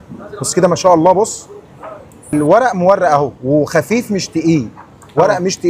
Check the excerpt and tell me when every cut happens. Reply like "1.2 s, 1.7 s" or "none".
2.3 s